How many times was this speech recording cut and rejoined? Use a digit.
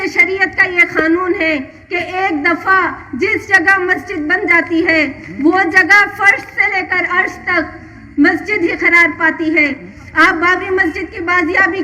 1